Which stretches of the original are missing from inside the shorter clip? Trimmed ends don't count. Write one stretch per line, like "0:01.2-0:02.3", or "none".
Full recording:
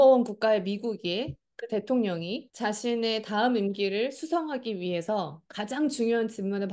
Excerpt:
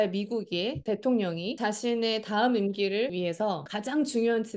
0:01.3-0:01.6
0:02.4-0:02.5
0:04.3-0:05.2